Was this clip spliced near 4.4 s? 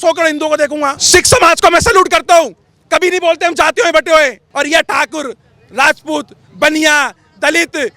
yes; 2 cuts; at 1.0 s, 4.4 s

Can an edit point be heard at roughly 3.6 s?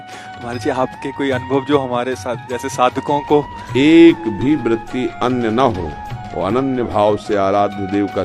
yes; 1 cut; at 3.6 s

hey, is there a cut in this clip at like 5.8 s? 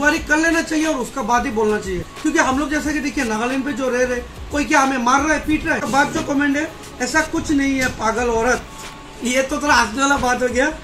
yes; 2 cuts; at 2.1 s, 5.8 s

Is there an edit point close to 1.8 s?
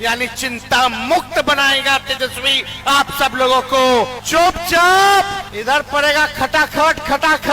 no; 2 cuts; at 4.2 s, 5.5 s

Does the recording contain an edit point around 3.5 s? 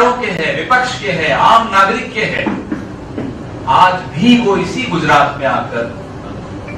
yes; 1 cut; at 3.5 s

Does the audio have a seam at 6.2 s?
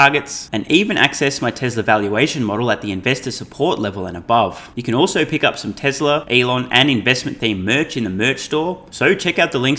yes; 3 cuts; at 4.7 s, 6.2 s, 8.9 s

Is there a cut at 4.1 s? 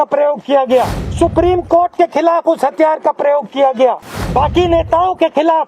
yes; 2 cuts; at 1.0 s, 4.1 s

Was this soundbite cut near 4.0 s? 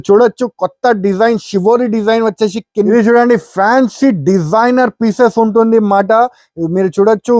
no; 1 cut; at 2.6 s

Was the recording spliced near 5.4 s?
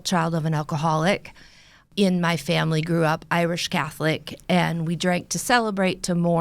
no; 1 cut; at 1.8 s

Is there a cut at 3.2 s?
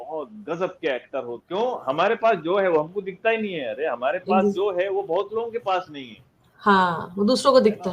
no; 1 cut; at 1.4 s

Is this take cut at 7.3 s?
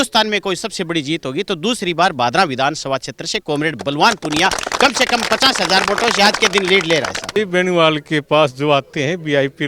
yes; 1 cut; at 7.3 s

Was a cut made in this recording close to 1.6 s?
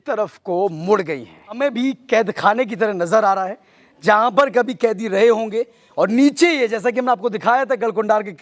yes; 1 cut; at 1.6 s

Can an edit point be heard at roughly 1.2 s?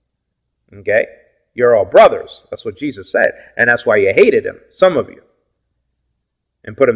no; 0 cuts

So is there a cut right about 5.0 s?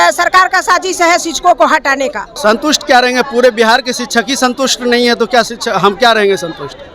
no; 1 cut; at 2.3 s

